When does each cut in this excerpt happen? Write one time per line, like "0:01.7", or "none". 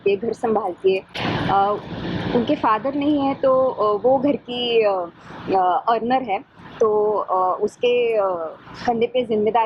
none